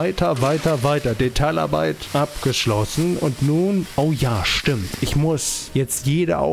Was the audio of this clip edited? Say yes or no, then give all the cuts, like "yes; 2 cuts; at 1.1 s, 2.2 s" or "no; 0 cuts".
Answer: yes; 3 cuts; at 2.0 s, 3.9 s, 5.6 s